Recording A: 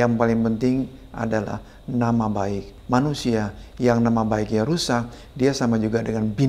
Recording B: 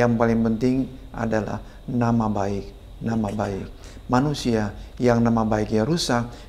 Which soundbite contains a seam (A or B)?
A